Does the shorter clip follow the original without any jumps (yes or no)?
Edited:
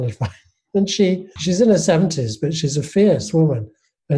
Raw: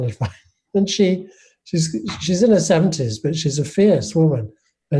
no